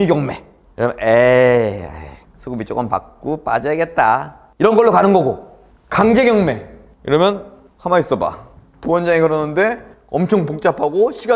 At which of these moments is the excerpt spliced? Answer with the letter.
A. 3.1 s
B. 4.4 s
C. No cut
B